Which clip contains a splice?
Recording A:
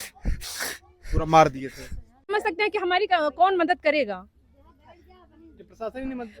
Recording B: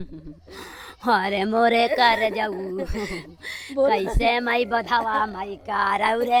A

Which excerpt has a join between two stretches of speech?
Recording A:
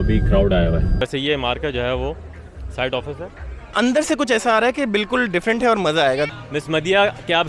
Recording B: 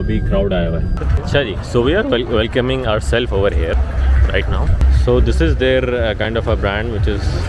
A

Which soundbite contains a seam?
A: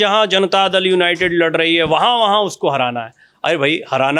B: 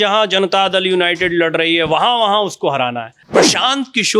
B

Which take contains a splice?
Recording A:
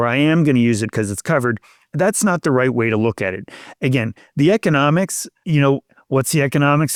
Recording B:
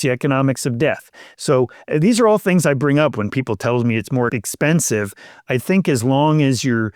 B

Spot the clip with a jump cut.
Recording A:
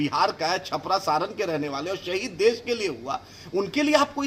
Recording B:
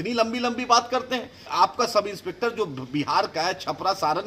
B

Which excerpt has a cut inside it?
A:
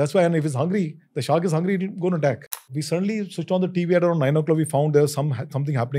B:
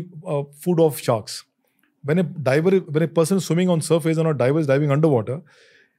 A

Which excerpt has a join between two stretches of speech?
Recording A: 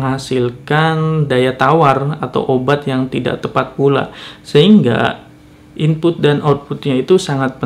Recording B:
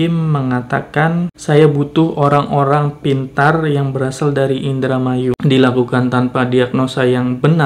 B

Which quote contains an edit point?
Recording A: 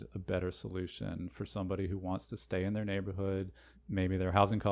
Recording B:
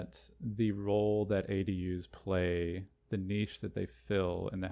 A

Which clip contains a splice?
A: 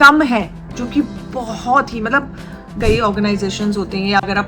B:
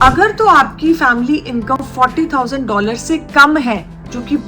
A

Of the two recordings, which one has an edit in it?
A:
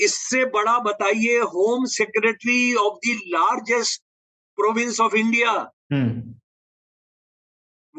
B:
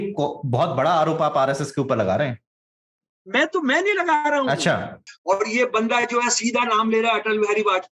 B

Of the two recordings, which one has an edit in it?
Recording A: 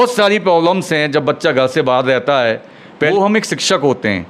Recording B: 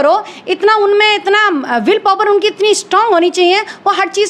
A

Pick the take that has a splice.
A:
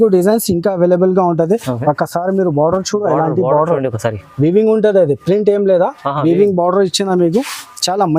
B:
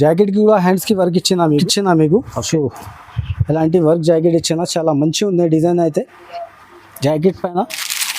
B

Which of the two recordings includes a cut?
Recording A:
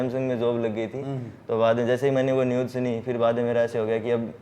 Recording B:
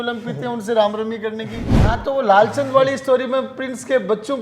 B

